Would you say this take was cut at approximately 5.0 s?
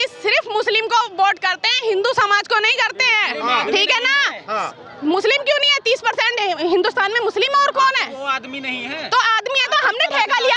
no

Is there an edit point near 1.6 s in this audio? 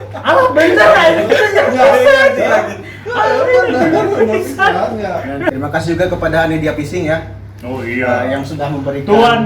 no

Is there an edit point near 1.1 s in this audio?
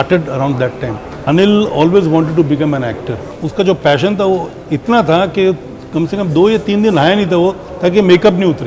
yes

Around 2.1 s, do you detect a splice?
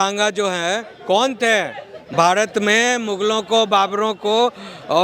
yes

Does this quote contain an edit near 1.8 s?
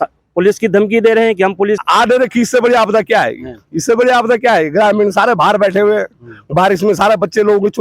yes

